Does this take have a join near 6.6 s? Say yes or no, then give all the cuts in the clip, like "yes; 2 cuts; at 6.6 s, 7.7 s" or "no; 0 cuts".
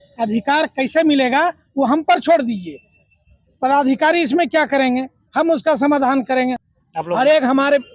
yes; 1 cut; at 6.6 s